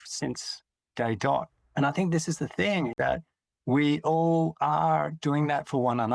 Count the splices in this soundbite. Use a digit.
2